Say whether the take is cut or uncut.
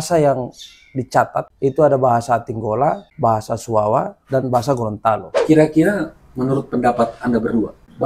cut